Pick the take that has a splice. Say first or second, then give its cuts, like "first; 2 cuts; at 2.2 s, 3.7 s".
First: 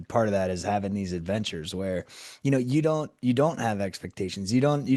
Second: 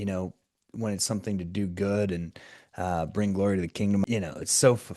second; 1 cut; at 4.0 s